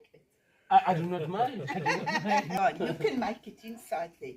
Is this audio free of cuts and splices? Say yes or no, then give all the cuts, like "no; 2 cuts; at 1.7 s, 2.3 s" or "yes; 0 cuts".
no; 1 cut; at 2.6 s